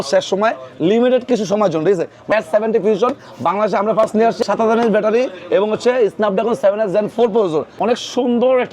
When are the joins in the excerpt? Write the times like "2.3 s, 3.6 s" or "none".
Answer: 2.3 s, 4.4 s, 7.7 s